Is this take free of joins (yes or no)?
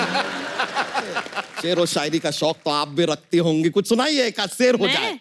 no